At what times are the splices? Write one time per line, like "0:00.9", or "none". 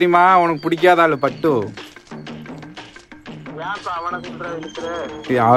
none